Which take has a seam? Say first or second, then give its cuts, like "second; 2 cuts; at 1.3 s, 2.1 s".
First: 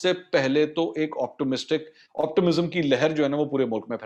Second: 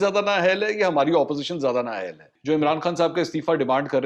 second; 1 cut; at 2.3 s